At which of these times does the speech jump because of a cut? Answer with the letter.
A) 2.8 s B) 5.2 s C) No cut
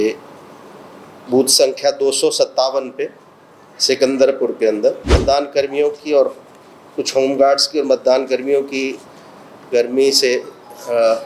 B